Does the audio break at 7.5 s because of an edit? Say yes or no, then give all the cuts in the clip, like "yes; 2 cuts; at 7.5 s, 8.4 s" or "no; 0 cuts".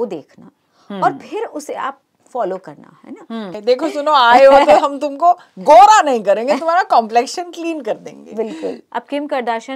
no; 2 cuts; at 3.5 s, 8.8 s